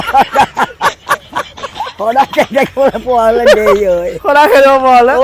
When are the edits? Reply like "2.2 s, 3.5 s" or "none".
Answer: none